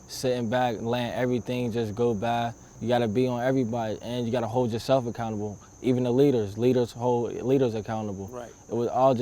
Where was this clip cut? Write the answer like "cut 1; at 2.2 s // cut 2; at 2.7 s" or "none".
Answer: cut 1; at 2.7 s